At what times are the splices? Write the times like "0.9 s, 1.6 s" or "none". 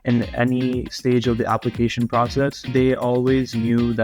2.6 s